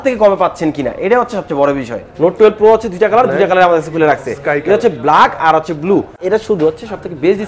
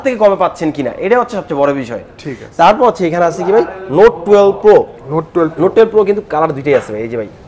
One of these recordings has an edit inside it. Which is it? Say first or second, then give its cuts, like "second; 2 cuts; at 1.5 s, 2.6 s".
first; 2 cuts; at 2.0 s, 6.2 s